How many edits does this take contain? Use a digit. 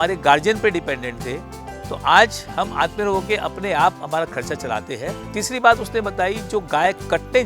1